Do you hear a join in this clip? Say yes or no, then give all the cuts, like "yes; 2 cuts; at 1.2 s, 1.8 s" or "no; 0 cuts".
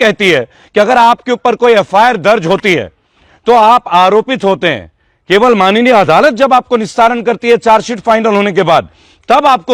no; 0 cuts